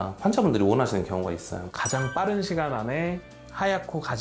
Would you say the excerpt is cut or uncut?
uncut